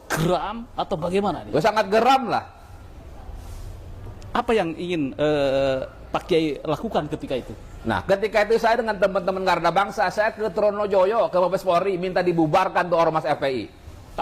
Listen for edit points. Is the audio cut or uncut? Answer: uncut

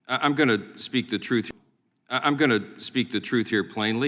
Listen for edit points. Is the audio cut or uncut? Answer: uncut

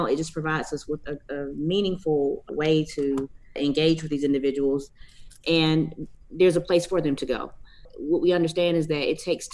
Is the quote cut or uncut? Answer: cut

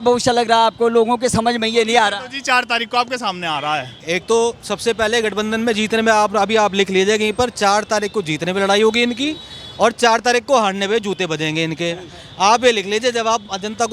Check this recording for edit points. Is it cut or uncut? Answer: uncut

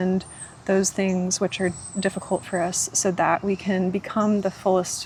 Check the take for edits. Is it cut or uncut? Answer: uncut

